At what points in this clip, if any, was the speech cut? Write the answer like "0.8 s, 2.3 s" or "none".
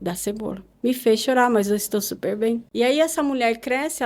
2.7 s